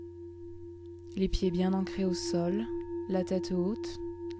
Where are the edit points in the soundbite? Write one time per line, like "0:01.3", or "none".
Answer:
0:01.1